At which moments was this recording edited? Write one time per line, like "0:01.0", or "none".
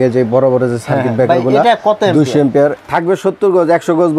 0:02.8